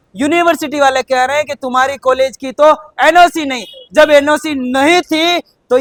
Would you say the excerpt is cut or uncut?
uncut